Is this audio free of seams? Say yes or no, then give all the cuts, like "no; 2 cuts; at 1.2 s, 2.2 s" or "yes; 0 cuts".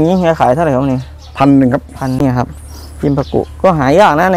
no; 1 cut; at 2.2 s